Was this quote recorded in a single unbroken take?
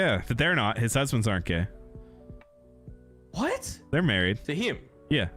no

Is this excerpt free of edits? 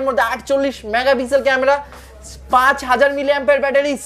yes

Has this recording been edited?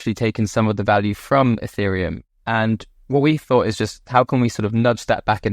yes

